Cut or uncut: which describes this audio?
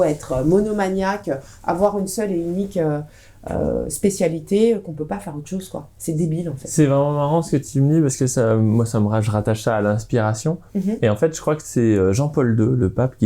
uncut